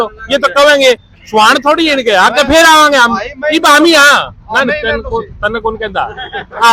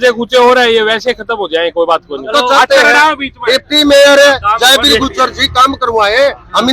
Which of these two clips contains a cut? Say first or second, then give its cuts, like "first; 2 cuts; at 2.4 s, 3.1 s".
second; 1 cut; at 2.2 s